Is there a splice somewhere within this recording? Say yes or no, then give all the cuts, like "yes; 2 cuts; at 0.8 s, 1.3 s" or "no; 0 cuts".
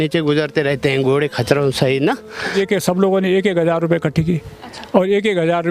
yes; 1 cut; at 2.5 s